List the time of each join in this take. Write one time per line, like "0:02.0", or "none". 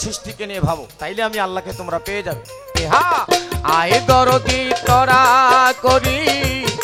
0:00.9
0:02.7